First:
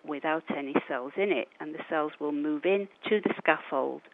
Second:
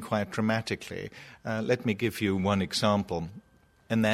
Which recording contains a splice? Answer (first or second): first